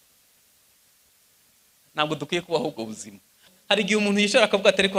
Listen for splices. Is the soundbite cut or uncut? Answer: cut